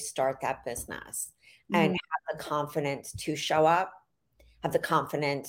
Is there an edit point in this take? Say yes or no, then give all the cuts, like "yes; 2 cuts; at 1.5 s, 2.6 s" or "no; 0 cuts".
no; 0 cuts